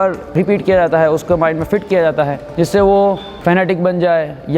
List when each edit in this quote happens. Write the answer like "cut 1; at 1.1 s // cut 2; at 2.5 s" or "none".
none